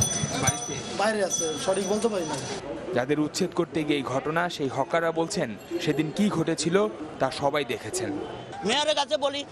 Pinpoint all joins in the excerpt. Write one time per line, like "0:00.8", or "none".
0:06.9